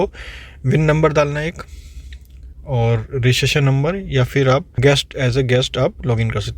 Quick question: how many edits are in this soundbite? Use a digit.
1